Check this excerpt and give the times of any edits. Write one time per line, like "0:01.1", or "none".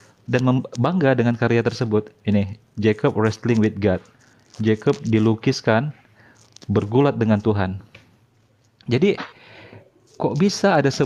none